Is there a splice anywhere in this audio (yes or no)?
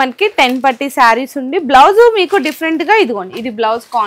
no